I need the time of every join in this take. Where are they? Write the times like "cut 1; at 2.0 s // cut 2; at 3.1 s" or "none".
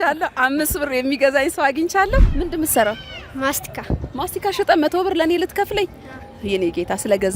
cut 1; at 2.3 s